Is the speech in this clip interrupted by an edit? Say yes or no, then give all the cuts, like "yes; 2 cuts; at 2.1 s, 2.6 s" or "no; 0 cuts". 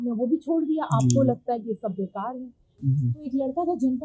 yes; 1 cut; at 2.8 s